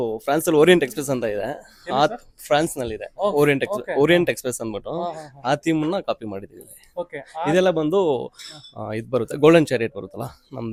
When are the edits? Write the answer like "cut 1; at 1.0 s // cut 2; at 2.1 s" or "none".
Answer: none

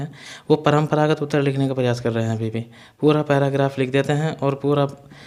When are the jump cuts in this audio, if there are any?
none

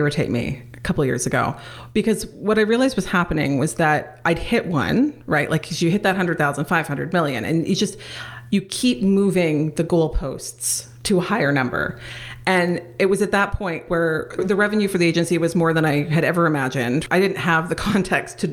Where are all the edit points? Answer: cut 1; at 13.8 s // cut 2; at 17.0 s

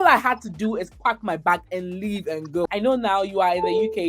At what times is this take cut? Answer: cut 1; at 2.7 s

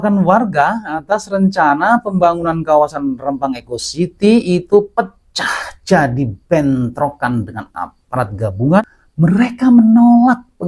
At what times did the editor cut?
cut 1; at 8.8 s

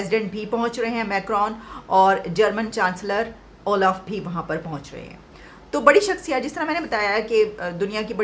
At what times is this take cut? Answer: none

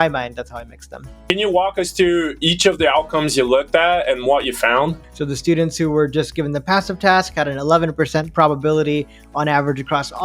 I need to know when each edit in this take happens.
cut 1; at 1.3 s // cut 2; at 5.1 s

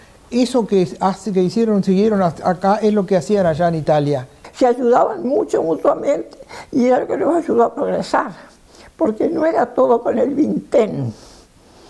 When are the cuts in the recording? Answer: cut 1; at 4.4 s

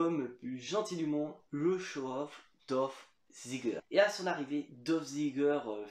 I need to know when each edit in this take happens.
cut 1; at 3.8 s

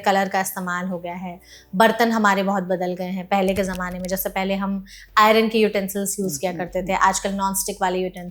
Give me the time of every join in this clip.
none

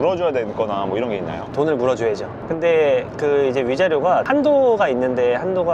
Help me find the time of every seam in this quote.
cut 1; at 1.5 s

